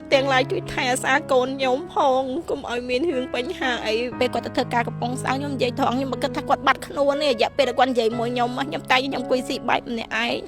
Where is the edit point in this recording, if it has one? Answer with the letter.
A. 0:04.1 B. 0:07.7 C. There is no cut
A